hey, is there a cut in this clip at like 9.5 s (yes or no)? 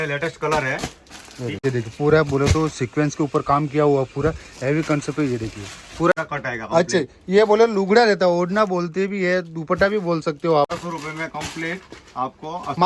no